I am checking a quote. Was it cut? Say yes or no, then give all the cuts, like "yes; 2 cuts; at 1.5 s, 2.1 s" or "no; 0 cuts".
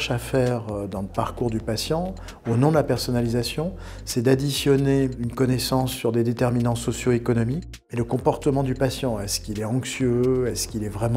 yes; 2 cuts; at 5.2 s, 7.7 s